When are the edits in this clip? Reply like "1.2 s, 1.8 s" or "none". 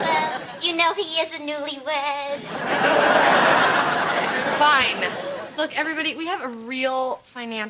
4.2 s